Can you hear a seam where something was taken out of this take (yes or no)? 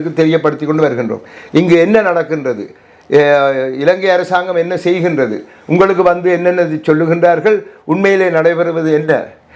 no